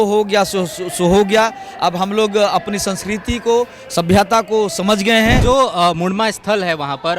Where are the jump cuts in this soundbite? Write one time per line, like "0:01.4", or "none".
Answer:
0:05.4